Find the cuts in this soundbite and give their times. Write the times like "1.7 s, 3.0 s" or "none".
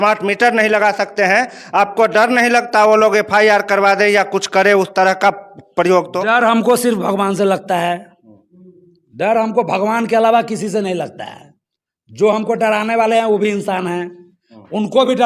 none